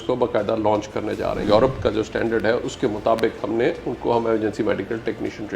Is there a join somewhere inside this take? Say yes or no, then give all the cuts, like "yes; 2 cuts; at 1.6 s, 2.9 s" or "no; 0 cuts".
yes; 1 cut; at 1.4 s